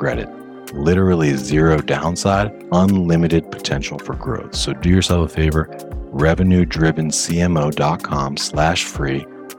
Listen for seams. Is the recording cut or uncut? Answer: cut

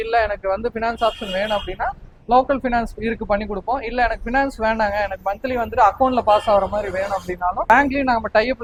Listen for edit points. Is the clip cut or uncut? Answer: uncut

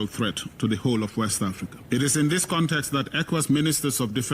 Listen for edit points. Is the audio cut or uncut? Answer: cut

